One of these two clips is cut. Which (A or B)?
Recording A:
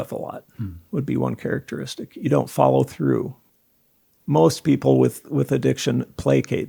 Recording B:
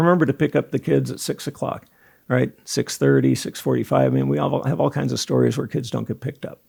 A